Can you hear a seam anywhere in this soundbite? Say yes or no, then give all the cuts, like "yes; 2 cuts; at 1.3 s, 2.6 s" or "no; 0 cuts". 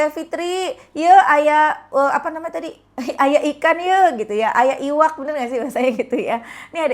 no; 0 cuts